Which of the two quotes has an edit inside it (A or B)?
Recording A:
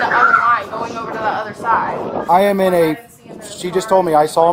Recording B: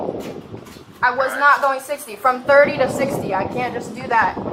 A